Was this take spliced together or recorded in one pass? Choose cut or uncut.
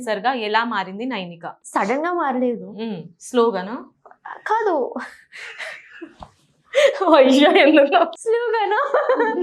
cut